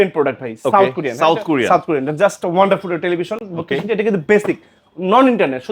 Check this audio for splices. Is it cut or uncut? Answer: uncut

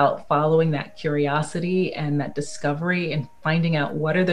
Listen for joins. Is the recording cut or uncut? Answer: uncut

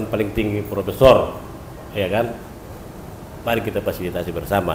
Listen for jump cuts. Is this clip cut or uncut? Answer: uncut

